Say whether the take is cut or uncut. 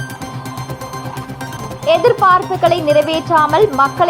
cut